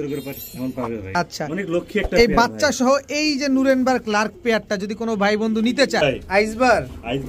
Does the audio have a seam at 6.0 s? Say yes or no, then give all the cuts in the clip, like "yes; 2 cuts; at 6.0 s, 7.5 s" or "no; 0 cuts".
yes; 2 cuts; at 1.0 s, 6.0 s